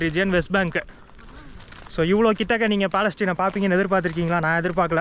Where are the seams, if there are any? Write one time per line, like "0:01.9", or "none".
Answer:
none